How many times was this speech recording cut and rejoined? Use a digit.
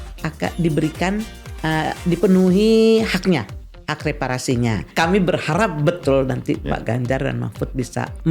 1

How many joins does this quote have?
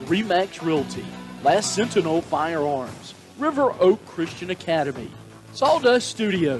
0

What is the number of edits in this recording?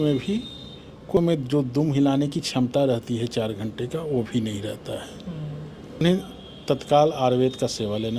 2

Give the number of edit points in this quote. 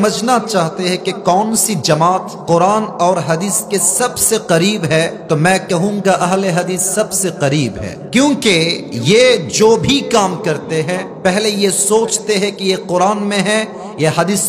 5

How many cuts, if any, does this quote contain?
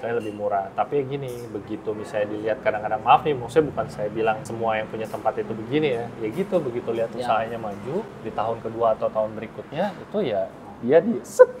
2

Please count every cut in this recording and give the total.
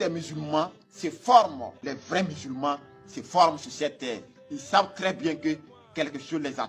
1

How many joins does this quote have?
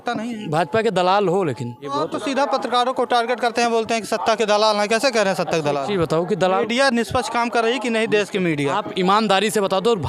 1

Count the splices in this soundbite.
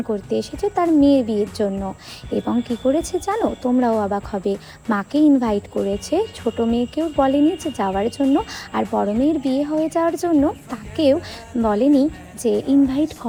0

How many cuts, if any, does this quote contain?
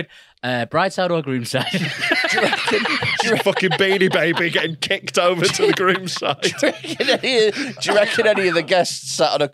0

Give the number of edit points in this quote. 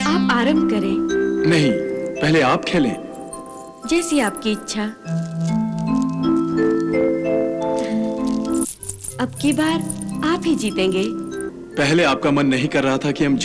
1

